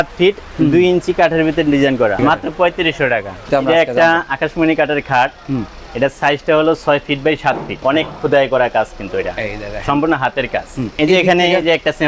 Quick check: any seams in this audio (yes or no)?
yes